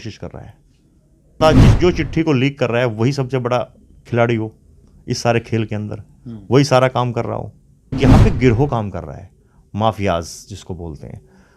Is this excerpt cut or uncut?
cut